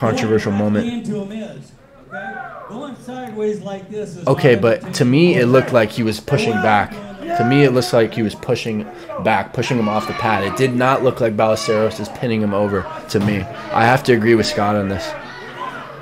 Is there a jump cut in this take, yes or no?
no